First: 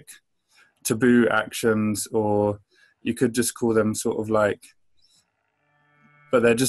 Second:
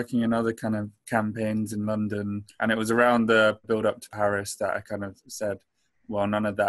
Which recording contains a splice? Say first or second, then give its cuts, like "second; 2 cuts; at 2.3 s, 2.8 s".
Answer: second; 2 cuts; at 2.5 s, 3.8 s